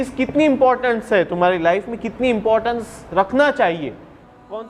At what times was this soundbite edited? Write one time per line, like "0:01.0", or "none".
none

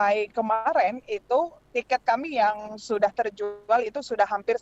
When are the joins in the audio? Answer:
none

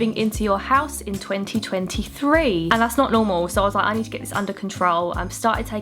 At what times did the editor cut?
0:02.7

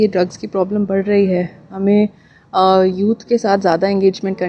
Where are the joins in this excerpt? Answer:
none

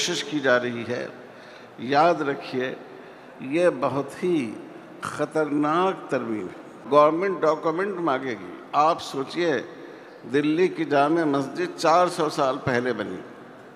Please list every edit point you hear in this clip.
0:06.8

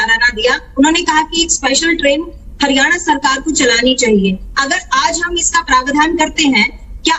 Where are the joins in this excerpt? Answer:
none

